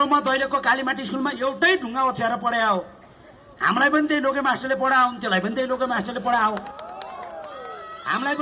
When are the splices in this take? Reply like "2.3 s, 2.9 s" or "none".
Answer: none